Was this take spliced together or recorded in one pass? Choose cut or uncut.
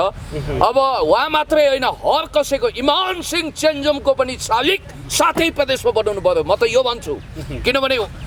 uncut